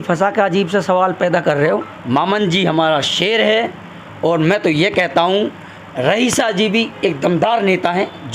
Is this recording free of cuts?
no; 1 cut; at 1.9 s

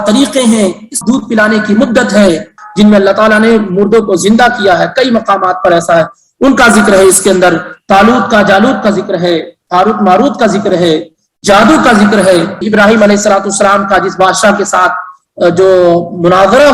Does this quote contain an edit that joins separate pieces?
yes; 3 cuts; at 0.9 s, 2.6 s, 12.6 s

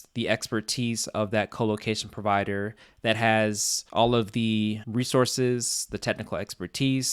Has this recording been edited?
no; 0 cuts

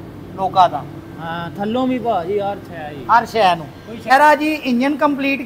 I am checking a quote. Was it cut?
yes; 1 cut; at 4.1 s

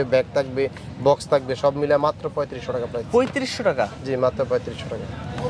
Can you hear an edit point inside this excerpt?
no; 0 cuts

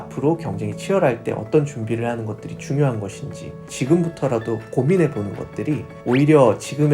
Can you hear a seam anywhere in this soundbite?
yes; 1 cut; at 3.7 s

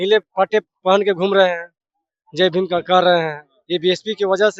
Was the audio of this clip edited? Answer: no; 0 cuts

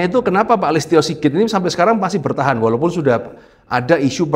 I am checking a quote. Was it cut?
no; 0 cuts

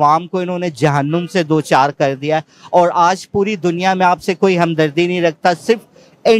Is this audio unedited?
yes; 0 cuts

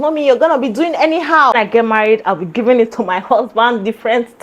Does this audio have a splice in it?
yes; 1 cut; at 1.5 s

